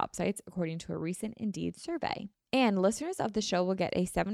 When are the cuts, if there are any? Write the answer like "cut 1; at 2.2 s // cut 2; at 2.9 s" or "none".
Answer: cut 1; at 2.3 s

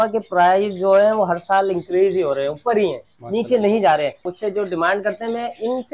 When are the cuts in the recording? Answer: cut 1; at 4.2 s

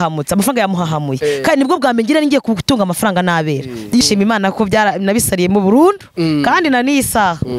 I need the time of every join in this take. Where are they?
cut 1; at 4.0 s

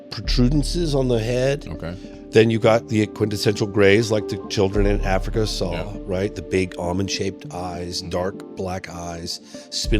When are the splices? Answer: cut 1; at 2.1 s

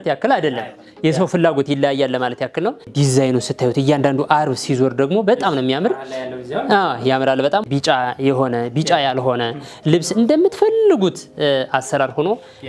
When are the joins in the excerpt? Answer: cut 1; at 2.9 s // cut 2; at 7.6 s

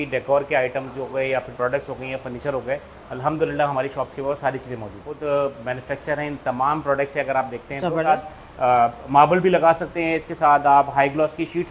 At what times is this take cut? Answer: cut 1; at 5.1 s // cut 2; at 8.0 s

